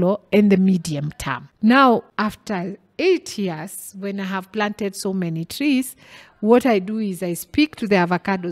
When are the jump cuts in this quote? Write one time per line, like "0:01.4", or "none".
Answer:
0:01.4
0:02.1